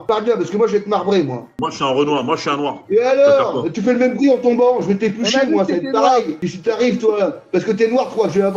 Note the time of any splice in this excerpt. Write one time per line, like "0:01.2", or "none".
0:01.6